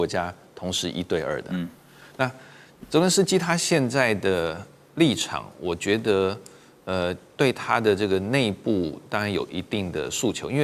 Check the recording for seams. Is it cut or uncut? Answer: uncut